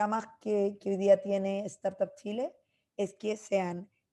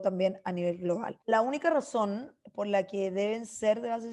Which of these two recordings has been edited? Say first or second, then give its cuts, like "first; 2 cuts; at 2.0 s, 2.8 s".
second; 1 cut; at 1.2 s